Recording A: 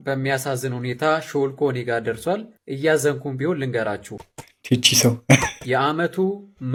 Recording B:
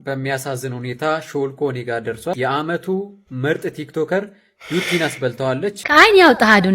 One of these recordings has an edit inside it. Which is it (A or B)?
B